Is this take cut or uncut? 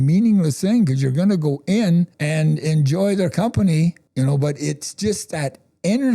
cut